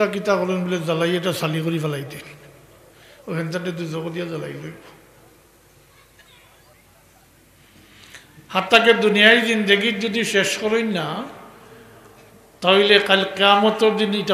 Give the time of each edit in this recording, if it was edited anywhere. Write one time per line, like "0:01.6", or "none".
0:06.8